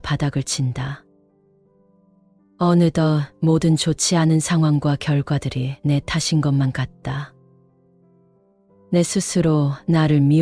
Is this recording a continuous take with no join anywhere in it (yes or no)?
no